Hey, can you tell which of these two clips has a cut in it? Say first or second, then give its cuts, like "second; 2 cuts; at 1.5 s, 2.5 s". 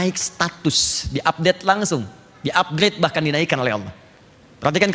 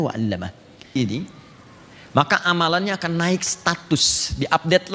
second; 1 cut; at 1.0 s